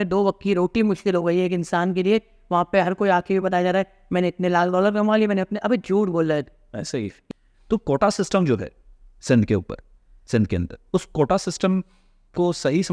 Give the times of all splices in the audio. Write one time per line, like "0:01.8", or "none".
0:07.2

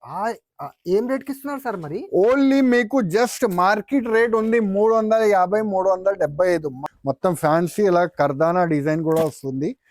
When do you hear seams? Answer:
0:06.8

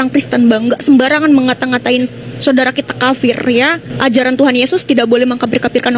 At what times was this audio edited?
0:03.9

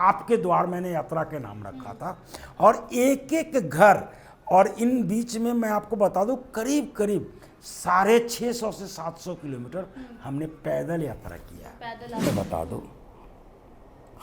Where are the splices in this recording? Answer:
0:12.2

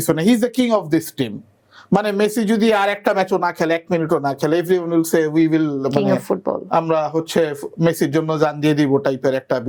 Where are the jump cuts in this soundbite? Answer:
none

